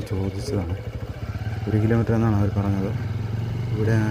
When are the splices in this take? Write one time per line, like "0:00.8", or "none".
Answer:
none